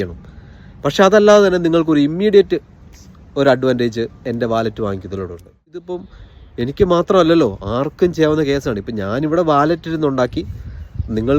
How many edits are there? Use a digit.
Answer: 1